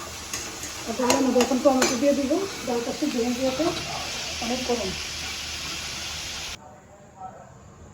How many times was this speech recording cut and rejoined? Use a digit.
1